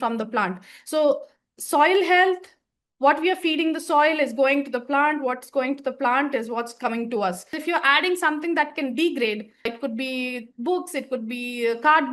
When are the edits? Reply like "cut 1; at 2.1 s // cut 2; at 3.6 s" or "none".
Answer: cut 1; at 7.6 s